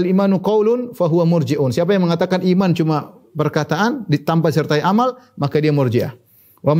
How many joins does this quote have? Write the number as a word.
zero